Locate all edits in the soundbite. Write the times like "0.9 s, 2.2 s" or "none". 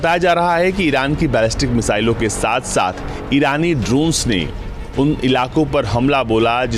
none